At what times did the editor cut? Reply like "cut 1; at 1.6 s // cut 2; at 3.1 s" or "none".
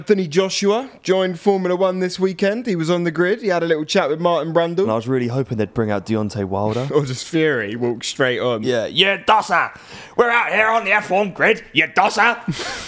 cut 1; at 4.9 s // cut 2; at 6.9 s // cut 3; at 8.6 s